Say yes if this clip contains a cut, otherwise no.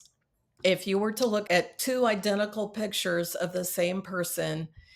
yes